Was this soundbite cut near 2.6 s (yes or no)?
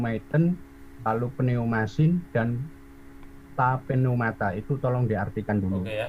no